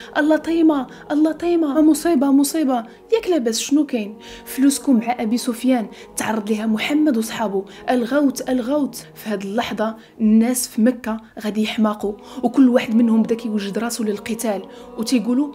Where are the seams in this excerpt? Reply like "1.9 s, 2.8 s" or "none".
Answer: 1.8 s